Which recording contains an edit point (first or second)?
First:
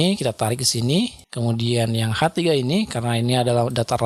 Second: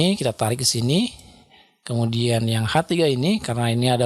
first